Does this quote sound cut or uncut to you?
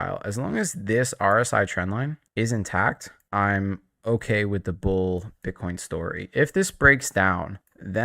uncut